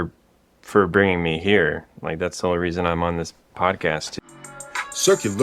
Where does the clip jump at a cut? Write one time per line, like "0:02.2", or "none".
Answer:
0:04.2